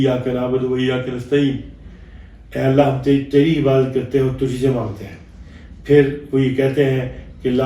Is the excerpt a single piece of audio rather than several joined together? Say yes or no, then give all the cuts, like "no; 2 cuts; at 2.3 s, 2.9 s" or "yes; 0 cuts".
yes; 0 cuts